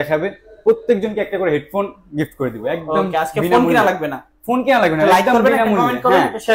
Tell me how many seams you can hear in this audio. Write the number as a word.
zero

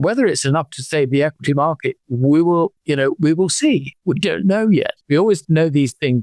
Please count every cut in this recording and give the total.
one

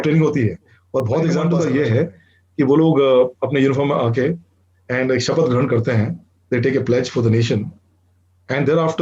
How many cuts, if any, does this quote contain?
one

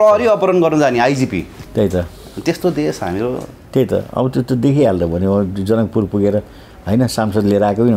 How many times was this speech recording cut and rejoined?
zero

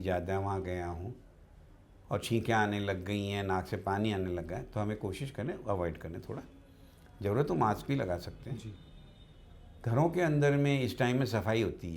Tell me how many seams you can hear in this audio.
zero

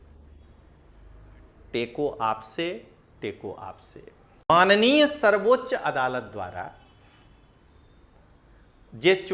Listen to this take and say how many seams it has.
one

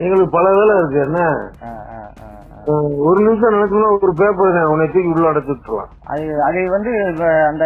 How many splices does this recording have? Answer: one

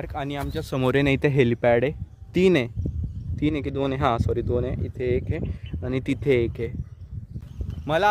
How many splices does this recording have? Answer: zero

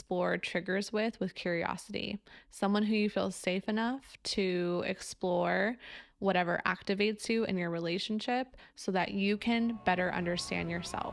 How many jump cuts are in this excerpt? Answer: zero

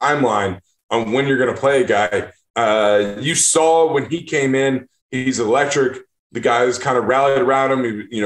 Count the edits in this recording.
zero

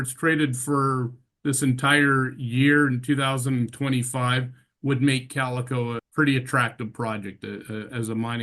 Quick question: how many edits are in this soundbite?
one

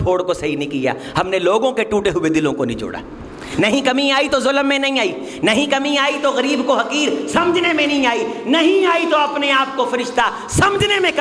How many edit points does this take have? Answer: zero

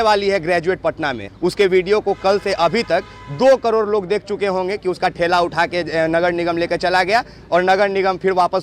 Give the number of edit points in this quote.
one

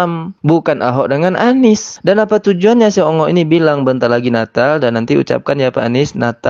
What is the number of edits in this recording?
one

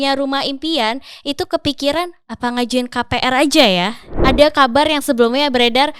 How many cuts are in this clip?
one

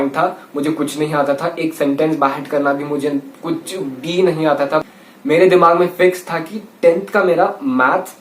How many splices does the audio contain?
one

